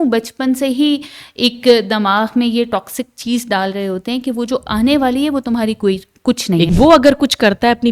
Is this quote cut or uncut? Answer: cut